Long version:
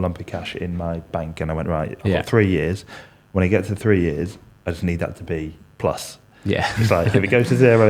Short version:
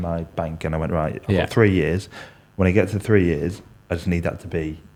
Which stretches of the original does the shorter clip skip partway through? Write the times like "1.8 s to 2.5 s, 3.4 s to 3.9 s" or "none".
none